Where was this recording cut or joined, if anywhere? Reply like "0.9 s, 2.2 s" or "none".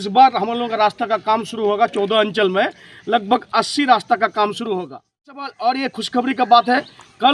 5.5 s